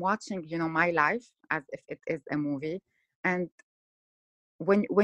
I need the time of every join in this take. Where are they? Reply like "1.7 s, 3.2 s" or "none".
none

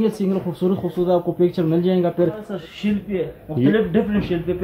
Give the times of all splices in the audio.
2.5 s

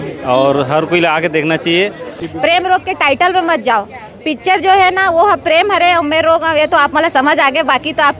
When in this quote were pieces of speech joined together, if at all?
2.2 s

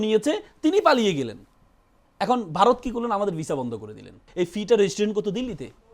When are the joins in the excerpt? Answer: 4.2 s

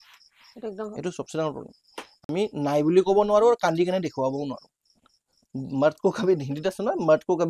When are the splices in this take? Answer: none

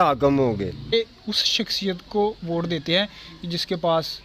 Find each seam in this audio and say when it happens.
0.9 s

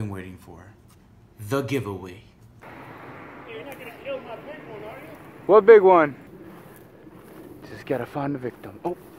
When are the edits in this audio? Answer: 2.7 s, 6.3 s

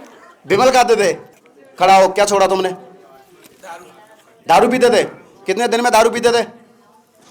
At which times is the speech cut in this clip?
1.3 s

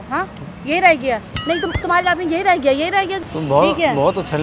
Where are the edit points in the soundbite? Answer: 3.2 s

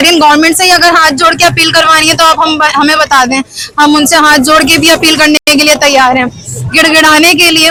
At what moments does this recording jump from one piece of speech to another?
none

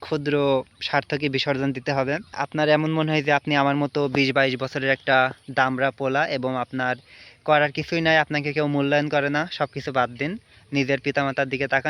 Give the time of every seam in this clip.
2.4 s

